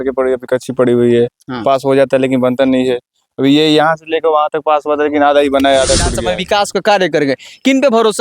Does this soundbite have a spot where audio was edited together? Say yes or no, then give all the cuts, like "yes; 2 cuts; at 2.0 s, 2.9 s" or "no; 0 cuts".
yes; 1 cut; at 6.1 s